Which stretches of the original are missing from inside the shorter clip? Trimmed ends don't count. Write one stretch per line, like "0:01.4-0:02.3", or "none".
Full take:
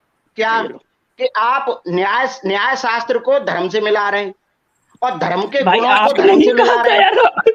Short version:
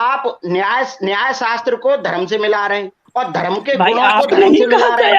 0:04.4-0:04.8